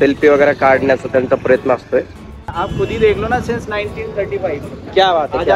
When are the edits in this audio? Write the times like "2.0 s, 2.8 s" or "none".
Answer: 2.4 s